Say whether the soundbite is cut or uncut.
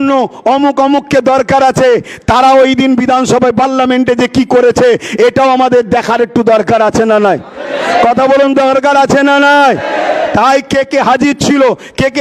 uncut